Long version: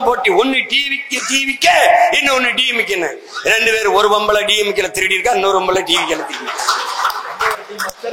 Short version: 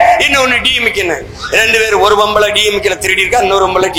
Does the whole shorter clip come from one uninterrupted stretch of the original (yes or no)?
yes